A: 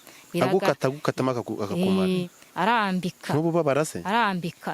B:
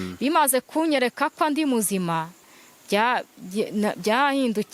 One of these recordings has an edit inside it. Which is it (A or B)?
A